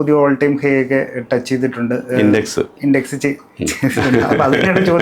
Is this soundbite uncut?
yes; 0 cuts

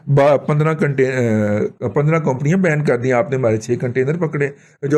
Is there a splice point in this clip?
no; 0 cuts

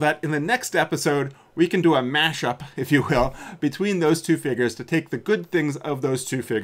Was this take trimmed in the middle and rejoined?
no; 0 cuts

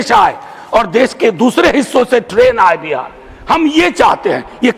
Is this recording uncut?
yes; 0 cuts

